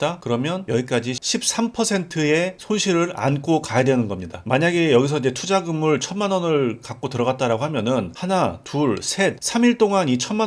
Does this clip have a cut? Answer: yes; 1 cut; at 1.2 s

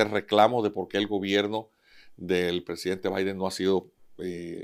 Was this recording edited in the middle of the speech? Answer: no; 0 cuts

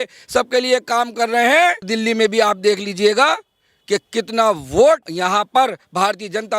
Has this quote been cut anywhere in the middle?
yes; 2 cuts; at 1.9 s, 5.1 s

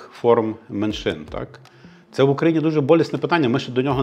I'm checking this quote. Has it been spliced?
no; 0 cuts

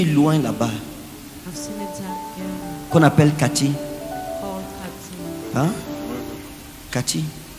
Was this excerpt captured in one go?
yes; 0 cuts

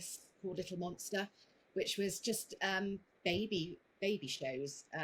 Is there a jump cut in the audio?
no; 0 cuts

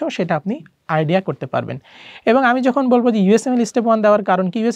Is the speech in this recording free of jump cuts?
yes; 0 cuts

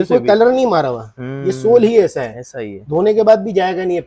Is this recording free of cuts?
yes; 0 cuts

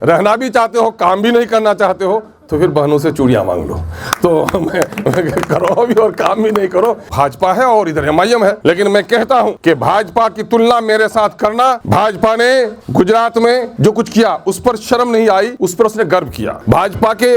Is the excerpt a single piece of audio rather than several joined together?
no; 8 cuts; at 7.0 s, 8.6 s, 9.6 s, 11.8 s, 12.8 s, 13.7 s, 15.5 s, 16.6 s

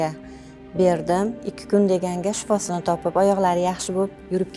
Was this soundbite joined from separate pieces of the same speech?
yes; 1 cut; at 1.4 s

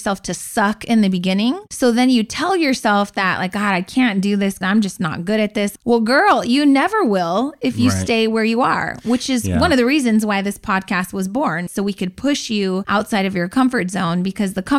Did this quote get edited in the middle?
yes; 5 cuts; at 1.7 s, 4.6 s, 5.8 s, 11.7 s, 12.8 s

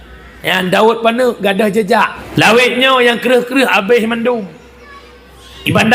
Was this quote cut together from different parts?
yes; 1 cut; at 2.2 s

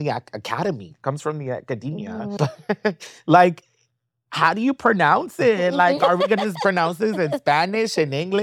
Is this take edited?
yes; 2 cuts; at 2.3 s, 6.0 s

